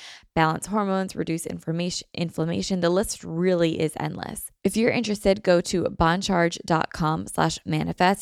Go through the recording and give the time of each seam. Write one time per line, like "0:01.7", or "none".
0:04.4